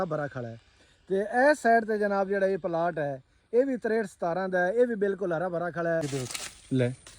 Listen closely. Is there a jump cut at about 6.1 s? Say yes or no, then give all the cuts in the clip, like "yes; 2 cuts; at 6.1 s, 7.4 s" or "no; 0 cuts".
yes; 1 cut; at 6.1 s